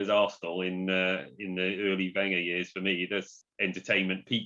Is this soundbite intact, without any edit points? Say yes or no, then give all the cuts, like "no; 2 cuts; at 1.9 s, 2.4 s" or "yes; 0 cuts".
no; 1 cut; at 3.4 s